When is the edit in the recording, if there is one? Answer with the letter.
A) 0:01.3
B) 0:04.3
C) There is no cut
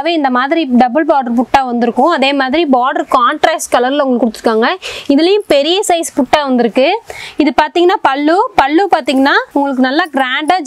C